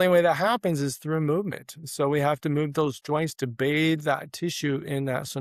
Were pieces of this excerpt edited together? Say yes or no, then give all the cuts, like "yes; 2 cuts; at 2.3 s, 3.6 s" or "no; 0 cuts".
no; 0 cuts